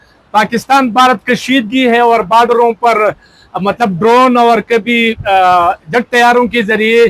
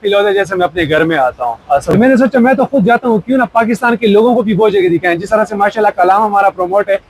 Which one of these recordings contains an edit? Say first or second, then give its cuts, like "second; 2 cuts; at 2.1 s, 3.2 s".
second; 1 cut; at 1.9 s